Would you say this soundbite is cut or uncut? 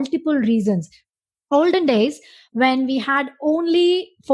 cut